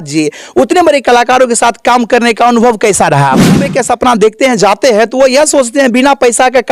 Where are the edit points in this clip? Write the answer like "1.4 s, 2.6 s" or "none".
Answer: 3.7 s